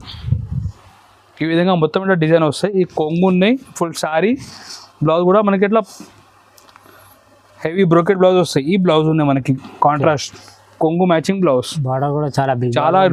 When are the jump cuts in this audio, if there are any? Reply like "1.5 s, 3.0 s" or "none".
none